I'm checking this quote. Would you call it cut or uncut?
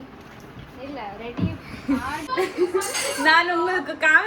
cut